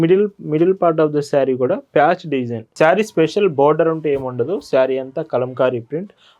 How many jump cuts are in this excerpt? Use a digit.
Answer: 1